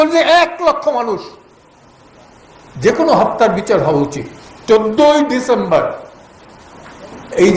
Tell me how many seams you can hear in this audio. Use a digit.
1